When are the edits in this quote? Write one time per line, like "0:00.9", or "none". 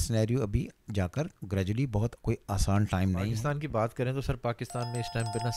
0:03.3

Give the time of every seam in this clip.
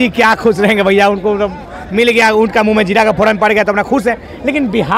none

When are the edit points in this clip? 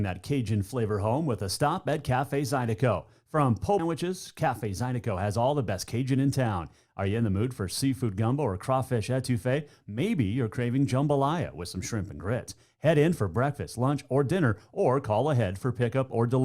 0:03.8

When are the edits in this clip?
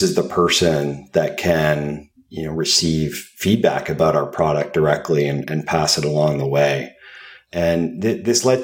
none

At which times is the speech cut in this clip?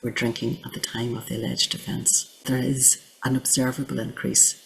0:02.4

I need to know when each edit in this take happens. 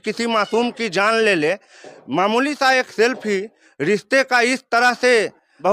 none

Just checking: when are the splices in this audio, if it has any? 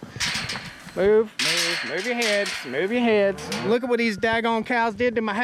0:03.7

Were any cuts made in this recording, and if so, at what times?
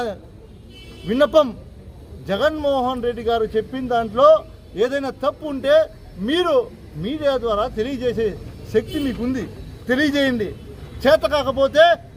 none

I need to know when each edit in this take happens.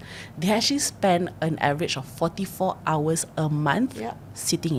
none

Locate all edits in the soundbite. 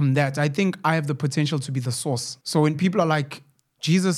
0:02.3

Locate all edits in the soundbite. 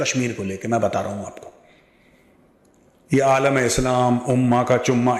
none

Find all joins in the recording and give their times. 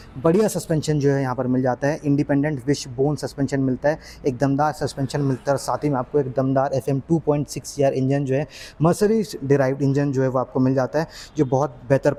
none

